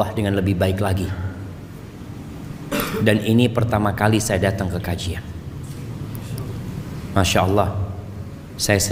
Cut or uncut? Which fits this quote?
uncut